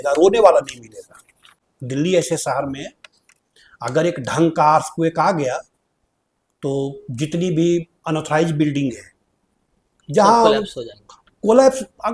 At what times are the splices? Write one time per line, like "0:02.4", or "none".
none